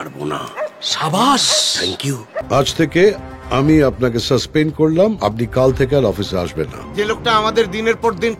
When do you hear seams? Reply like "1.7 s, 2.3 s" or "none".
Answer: 2.3 s, 6.8 s